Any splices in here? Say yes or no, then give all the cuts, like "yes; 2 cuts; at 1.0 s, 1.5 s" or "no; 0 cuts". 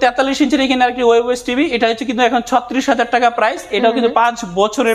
no; 0 cuts